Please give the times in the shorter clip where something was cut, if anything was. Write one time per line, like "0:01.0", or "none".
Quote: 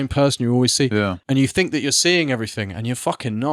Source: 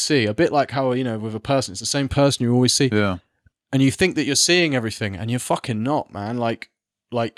0:01.2